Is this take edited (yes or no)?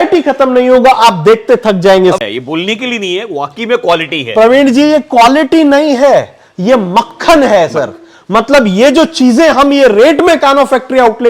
yes